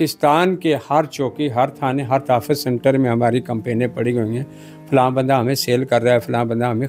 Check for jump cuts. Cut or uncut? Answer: uncut